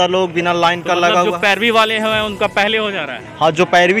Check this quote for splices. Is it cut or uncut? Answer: uncut